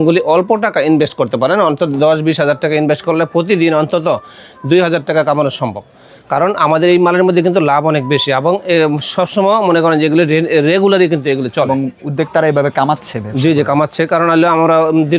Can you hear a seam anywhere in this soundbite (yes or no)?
no